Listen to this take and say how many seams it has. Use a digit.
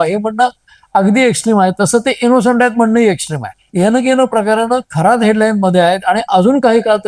1